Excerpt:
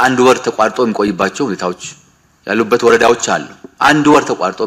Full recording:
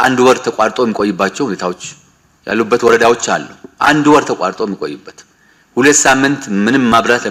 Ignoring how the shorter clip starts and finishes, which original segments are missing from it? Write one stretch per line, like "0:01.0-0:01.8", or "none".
none